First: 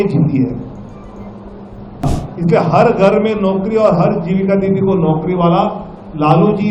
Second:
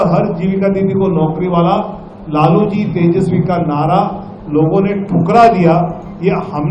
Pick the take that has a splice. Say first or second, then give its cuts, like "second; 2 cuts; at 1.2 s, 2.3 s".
first; 1 cut; at 2.1 s